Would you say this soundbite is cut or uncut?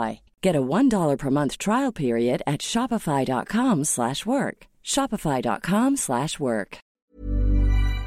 cut